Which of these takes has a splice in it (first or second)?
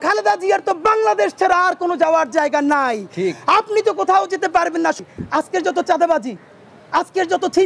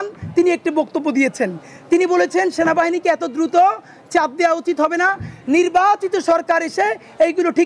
first